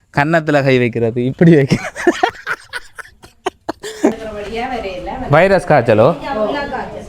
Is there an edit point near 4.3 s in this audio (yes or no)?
yes